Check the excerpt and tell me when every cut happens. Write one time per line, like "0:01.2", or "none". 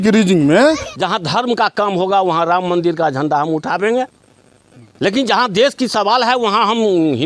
0:00.9